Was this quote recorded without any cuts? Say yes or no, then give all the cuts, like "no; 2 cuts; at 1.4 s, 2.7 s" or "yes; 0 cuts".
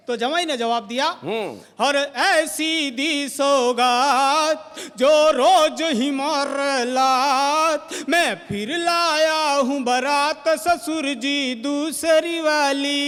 yes; 0 cuts